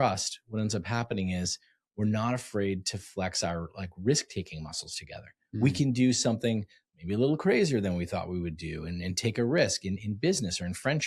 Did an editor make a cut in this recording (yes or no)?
no